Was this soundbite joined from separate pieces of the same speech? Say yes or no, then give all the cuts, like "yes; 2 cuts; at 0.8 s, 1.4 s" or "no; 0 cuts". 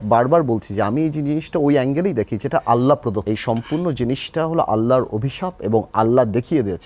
yes; 1 cut; at 3.2 s